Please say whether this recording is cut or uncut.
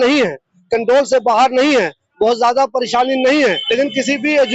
cut